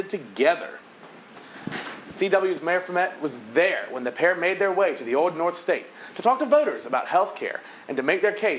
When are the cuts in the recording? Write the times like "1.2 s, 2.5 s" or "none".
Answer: none